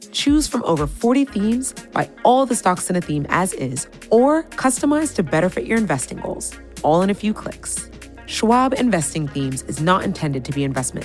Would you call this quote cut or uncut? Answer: uncut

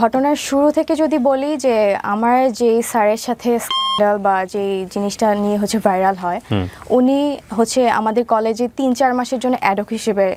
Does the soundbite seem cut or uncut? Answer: uncut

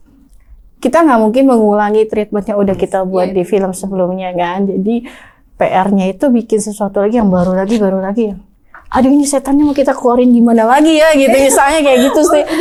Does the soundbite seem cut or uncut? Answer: uncut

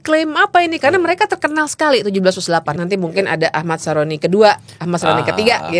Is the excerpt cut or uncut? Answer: cut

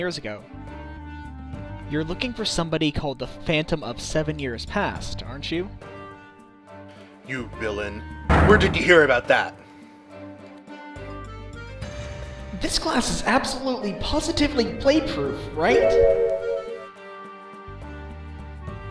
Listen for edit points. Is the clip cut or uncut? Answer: uncut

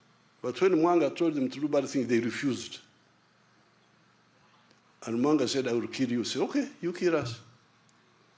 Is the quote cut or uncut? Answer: uncut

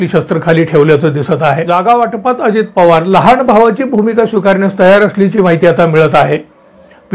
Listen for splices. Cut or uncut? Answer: cut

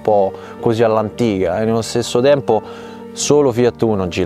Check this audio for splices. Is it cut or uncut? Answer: uncut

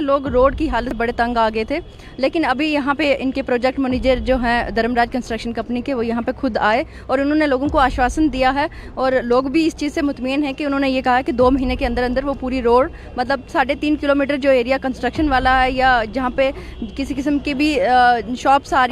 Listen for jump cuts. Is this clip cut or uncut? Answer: cut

